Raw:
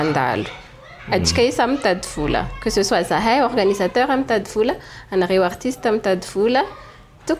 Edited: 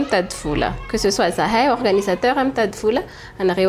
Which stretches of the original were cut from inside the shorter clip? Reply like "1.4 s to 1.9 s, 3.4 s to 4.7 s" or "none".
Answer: none